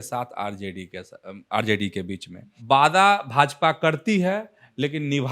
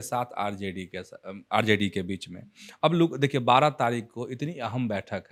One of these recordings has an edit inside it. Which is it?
first; 1 cut; at 2.5 s

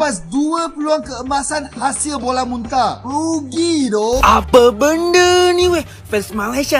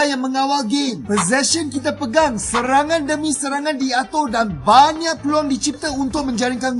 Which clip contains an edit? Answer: first; 1 cut; at 4.2 s

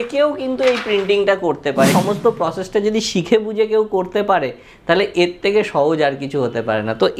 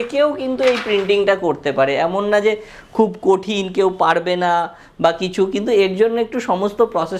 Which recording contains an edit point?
first; 1 cut; at 1.9 s

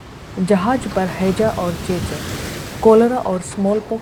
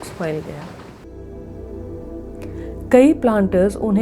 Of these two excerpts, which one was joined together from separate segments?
second; 1 cut; at 1.0 s

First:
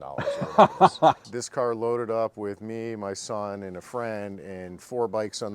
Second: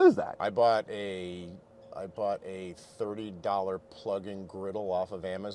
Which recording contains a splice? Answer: first; 1 cut; at 1.2 s

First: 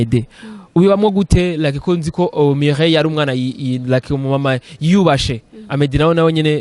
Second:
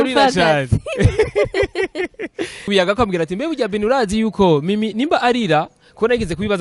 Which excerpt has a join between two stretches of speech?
second; 1 cut; at 2.7 s

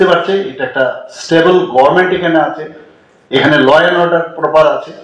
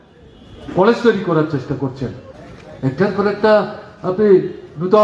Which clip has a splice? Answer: second; 1 cut; at 2.3 s

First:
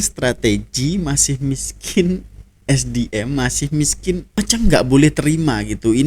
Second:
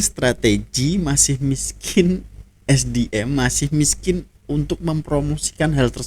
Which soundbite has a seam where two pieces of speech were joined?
first; 1 cut; at 4.4 s

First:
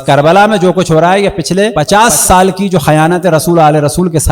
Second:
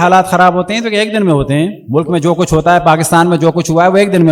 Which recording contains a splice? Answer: first; 1 cut; at 1.8 s

